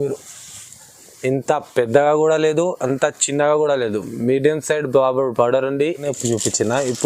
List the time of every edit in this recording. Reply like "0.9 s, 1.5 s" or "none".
6.0 s